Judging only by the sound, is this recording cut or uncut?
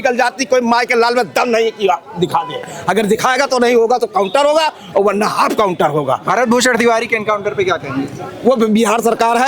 uncut